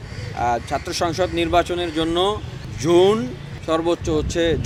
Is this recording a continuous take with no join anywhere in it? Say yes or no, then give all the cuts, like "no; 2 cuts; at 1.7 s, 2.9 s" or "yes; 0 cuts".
yes; 0 cuts